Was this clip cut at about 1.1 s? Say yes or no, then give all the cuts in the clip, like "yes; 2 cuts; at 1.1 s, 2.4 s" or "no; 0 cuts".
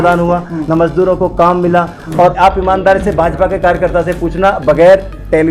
no; 1 cut; at 2.4 s